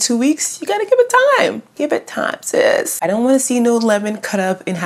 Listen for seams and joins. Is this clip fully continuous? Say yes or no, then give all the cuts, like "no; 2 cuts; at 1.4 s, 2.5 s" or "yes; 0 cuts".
no; 1 cut; at 2.9 s